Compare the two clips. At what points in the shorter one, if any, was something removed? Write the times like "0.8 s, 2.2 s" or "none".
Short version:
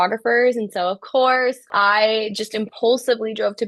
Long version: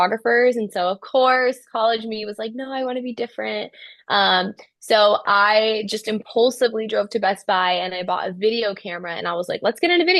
1.7 s